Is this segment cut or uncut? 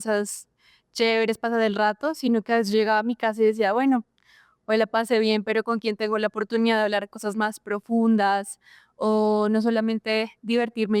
uncut